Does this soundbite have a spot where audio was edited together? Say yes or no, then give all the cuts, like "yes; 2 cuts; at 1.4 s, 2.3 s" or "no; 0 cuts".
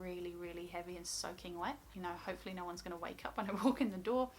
yes; 1 cut; at 2.2 s